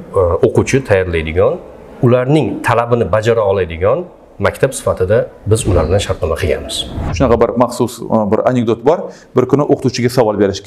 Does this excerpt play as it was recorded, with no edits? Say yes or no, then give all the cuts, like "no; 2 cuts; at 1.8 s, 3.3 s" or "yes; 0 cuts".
no; 1 cut; at 7.0 s